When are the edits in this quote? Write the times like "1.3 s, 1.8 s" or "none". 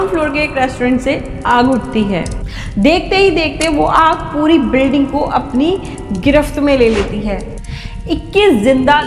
7.5 s